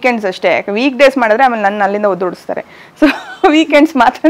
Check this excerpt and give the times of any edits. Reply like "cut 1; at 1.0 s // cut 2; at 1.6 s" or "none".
none